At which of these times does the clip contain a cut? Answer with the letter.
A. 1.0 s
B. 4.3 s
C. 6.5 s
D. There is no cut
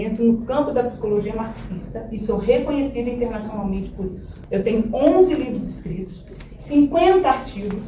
B